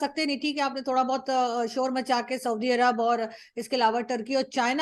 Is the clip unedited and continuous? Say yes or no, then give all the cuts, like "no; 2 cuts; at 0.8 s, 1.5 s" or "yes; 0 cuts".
yes; 0 cuts